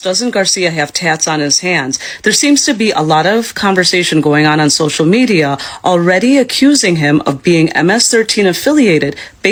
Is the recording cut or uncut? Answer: uncut